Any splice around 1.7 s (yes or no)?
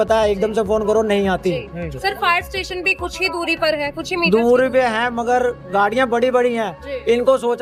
no